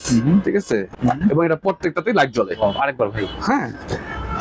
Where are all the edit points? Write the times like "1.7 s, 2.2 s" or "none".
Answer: 0.9 s

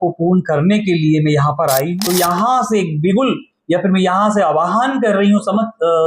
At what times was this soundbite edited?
1.9 s

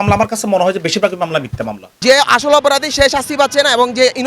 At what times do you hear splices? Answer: 2.0 s

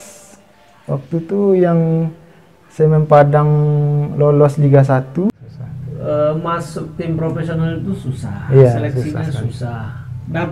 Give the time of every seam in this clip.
5.3 s

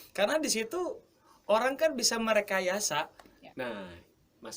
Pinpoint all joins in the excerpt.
3.4 s

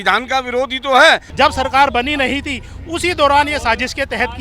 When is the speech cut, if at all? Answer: 1.3 s

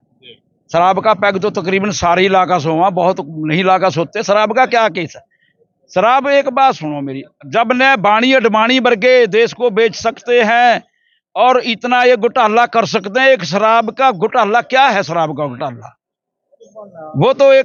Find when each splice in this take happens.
none

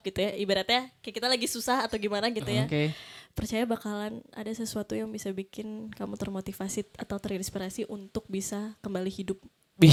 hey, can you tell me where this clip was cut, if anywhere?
none

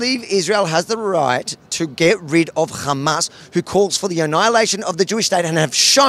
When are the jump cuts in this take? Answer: none

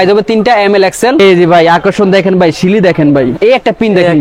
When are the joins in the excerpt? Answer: 1.2 s, 3.4 s

